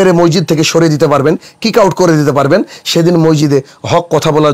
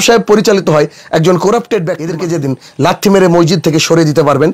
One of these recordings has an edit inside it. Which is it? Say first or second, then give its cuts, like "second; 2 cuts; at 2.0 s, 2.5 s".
second; 1 cut; at 2.1 s